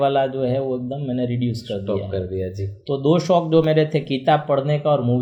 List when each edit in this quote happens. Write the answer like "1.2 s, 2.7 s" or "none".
none